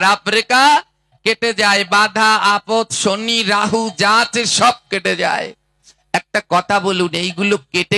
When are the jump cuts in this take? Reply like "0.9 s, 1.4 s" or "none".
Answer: none